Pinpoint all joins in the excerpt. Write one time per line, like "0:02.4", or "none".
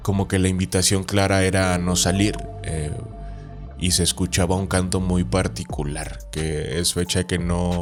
none